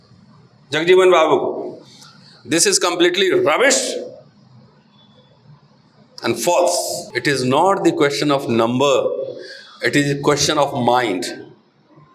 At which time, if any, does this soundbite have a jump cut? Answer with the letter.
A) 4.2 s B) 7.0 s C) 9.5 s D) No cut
B